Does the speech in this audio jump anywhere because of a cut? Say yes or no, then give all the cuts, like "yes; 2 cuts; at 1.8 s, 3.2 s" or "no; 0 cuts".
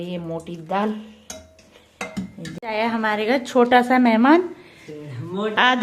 yes; 1 cut; at 2.6 s